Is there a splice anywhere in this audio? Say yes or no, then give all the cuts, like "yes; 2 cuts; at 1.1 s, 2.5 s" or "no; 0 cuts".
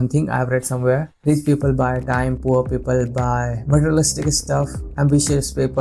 no; 0 cuts